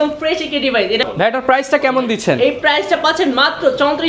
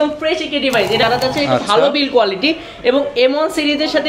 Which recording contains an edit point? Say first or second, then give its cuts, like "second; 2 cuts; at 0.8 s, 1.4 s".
second; 1 cut; at 1.0 s